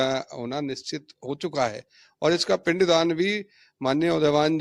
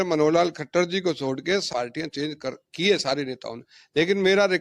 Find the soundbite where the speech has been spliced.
second; 1 cut; at 1.7 s

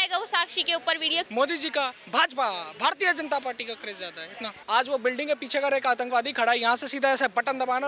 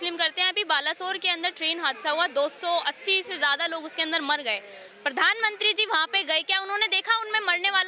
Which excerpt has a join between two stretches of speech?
first; 2 cuts; at 1.3 s, 4.6 s

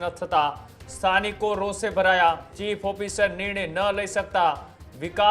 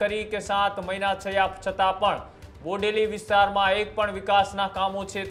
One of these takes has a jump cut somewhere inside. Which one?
first; 1 cut; at 2.5 s

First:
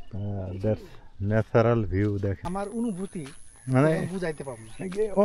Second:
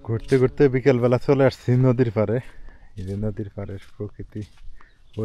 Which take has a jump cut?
first; 1 cut; at 2.4 s

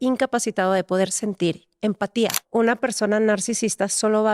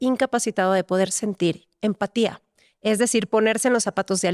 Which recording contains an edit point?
first; 1 cut; at 2.4 s

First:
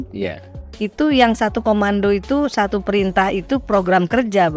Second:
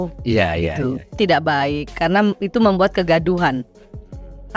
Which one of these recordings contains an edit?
second; 1 cut; at 1.1 s

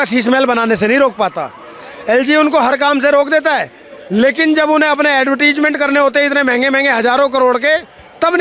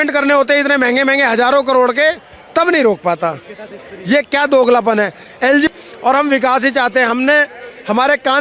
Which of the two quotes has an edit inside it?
second; 1 cut; at 5.7 s

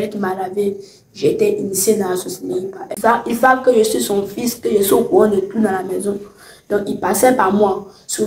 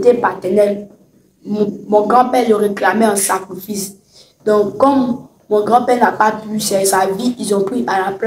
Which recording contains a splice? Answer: first; 1 cut; at 2.9 s

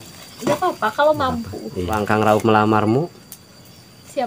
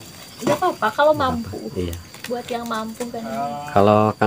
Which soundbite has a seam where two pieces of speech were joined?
first; 1 cut; at 2.0 s

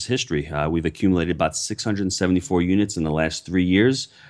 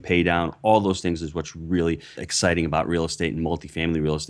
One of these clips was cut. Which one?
second; 1 cut; at 2.2 s

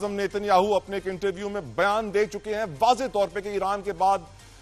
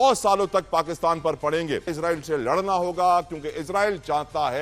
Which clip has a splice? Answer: second; 1 cut; at 1.9 s

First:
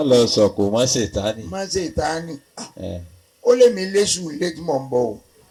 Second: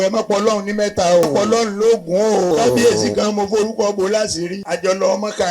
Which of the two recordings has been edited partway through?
second; 3 cuts; at 1.2 s, 2.5 s, 4.6 s

